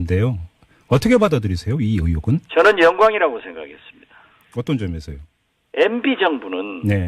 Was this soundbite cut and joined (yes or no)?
yes